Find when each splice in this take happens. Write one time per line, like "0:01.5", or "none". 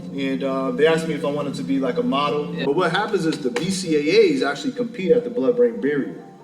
0:02.6